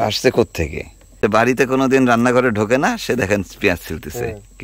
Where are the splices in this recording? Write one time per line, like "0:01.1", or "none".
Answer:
0:01.2